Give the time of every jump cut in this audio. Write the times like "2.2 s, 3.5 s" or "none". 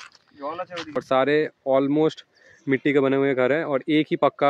1.0 s